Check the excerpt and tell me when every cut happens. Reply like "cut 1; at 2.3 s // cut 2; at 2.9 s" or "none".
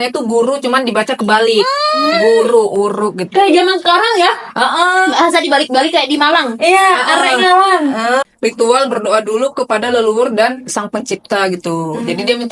cut 1; at 8.2 s